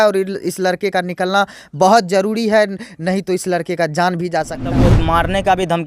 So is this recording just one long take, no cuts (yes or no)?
no